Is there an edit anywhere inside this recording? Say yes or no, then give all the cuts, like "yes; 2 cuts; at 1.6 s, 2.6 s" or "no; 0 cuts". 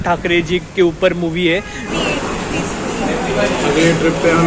yes; 1 cut; at 1.9 s